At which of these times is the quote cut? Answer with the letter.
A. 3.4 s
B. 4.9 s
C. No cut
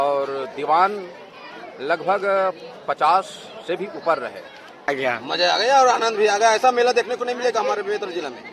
B